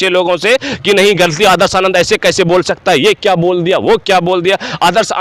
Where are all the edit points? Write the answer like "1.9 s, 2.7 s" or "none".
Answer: none